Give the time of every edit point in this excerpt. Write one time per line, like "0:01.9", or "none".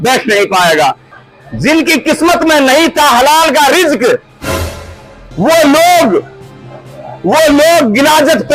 0:01.1